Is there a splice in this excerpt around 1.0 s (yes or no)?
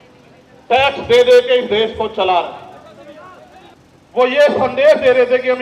no